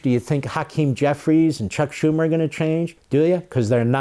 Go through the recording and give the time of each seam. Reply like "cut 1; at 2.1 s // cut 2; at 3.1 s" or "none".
cut 1; at 3.0 s